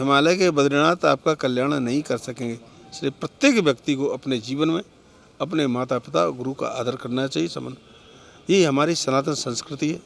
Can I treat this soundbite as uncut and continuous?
yes; 0 cuts

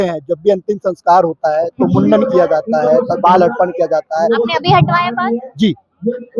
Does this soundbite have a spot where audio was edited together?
no; 0 cuts

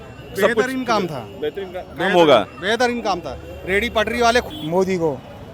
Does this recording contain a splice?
yes; 1 cut; at 4.5 s

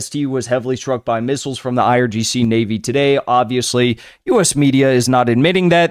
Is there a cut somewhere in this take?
no; 0 cuts

